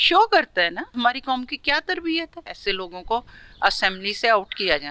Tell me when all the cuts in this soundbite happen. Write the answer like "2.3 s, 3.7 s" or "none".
0.9 s, 2.6 s